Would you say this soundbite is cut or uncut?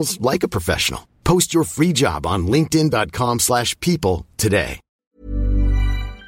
cut